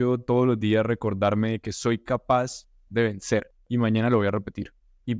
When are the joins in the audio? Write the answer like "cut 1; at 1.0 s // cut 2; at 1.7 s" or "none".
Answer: none